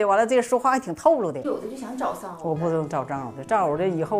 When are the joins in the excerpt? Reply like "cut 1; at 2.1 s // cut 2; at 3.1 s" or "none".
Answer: cut 1; at 1.5 s